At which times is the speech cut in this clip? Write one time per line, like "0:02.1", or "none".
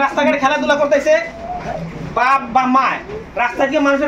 none